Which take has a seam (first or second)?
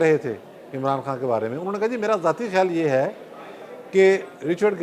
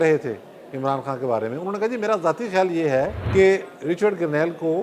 second